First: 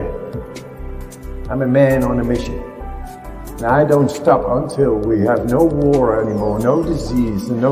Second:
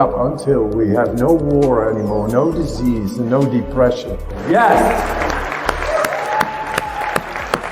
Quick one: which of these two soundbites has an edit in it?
second; 1 cut; at 4.4 s

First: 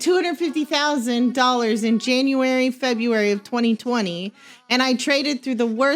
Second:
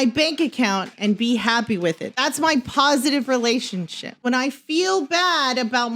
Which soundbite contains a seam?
second; 2 cuts; at 2.1 s, 4.2 s

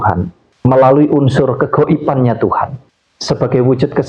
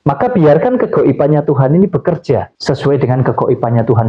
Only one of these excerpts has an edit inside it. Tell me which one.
second; 1 cut; at 2.5 s

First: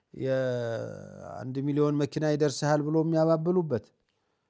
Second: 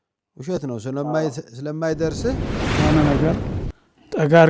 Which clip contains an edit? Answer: second; 1 cut; at 2.8 s

